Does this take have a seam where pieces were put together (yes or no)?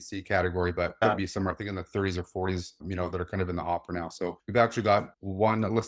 yes